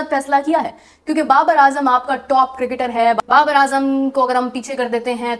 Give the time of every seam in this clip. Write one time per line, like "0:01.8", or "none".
none

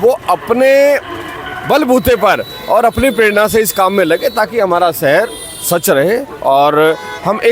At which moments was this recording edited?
none

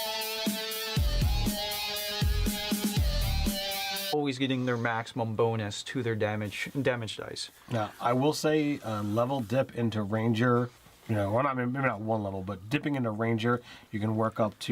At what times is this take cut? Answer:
none

